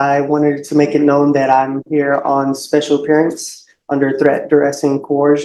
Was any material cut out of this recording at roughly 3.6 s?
no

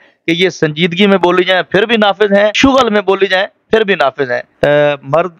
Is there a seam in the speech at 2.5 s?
yes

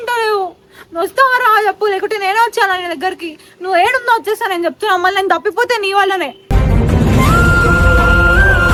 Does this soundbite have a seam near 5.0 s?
no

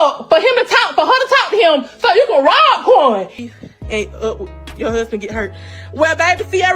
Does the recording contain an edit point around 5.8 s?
no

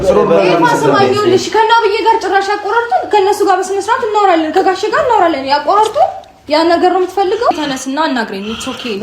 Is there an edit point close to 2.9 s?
no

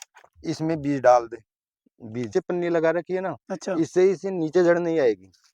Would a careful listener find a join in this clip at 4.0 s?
no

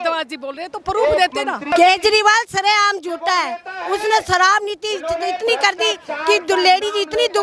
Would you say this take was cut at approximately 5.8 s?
no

